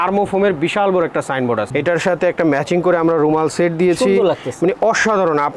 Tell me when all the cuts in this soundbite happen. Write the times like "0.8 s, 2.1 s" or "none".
1.7 s